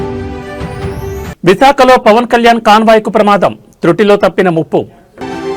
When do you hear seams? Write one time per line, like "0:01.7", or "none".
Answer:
none